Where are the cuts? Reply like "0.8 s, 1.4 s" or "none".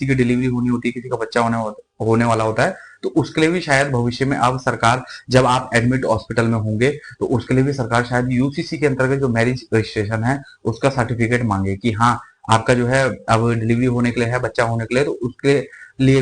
none

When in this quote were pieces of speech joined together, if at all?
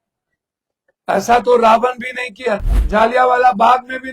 2.7 s

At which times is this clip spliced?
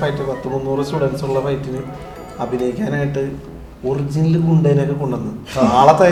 none

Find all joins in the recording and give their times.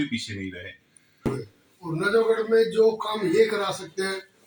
1.3 s

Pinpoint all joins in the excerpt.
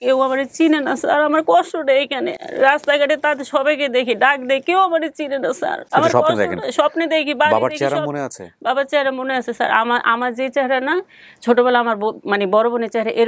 none

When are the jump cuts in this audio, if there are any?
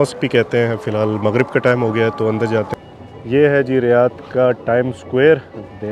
2.7 s

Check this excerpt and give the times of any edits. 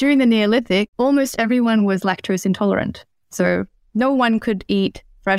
0.9 s

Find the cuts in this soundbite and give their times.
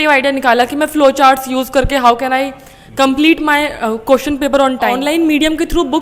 5.0 s

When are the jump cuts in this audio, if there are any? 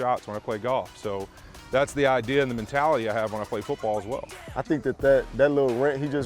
4.4 s

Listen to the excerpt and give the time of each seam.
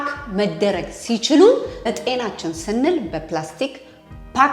1.9 s

